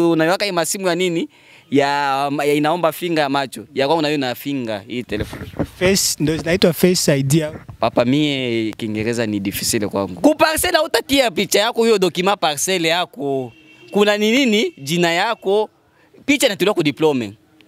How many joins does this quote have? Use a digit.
1